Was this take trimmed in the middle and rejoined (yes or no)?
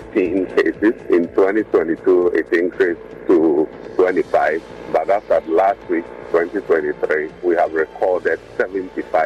yes